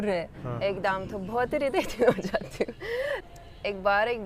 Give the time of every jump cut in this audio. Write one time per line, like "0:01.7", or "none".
0:03.3